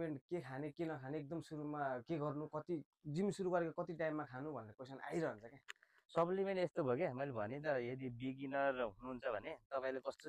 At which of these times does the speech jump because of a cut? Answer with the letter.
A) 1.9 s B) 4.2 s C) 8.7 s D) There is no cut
D